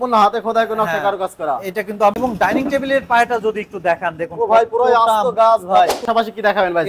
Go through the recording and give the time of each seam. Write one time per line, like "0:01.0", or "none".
0:02.1
0:06.0